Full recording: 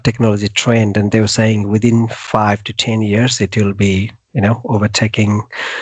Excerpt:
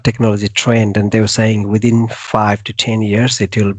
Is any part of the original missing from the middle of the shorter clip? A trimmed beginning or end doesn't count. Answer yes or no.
no